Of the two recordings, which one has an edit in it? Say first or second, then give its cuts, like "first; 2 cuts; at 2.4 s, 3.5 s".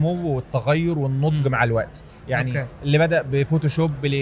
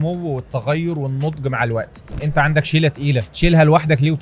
second; 2 cuts; at 2.1 s, 3.3 s